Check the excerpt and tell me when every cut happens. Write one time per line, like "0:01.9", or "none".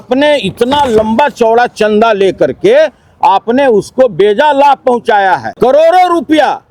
0:05.5